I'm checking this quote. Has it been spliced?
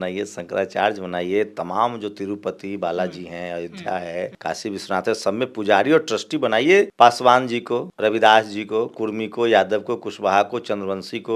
no; 0 cuts

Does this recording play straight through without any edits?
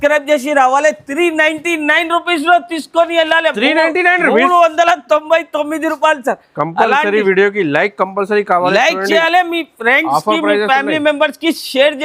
yes; 0 cuts

